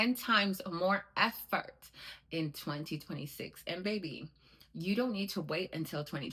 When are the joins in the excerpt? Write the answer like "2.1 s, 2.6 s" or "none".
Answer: none